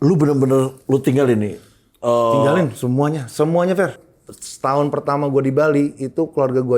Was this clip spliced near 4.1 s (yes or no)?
yes